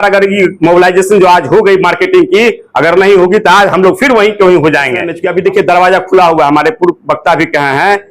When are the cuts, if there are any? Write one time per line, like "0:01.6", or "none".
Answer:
0:05.2